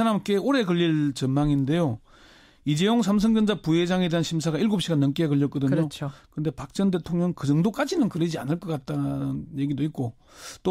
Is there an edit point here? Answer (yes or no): no